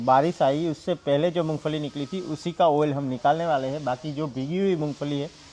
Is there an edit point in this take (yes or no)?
no